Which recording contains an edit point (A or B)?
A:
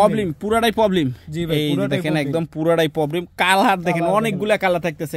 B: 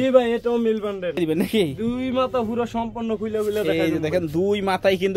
B